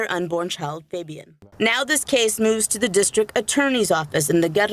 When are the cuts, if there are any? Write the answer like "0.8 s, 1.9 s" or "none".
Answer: 1.4 s